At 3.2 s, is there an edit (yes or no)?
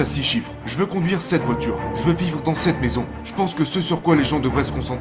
yes